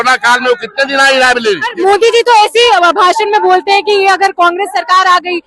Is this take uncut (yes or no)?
no